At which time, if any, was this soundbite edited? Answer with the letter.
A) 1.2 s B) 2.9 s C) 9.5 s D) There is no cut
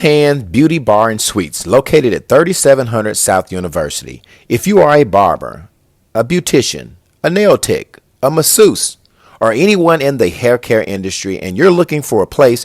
A